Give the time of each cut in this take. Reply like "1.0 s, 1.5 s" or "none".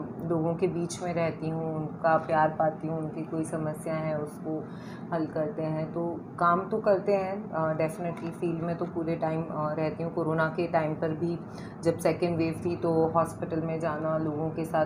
none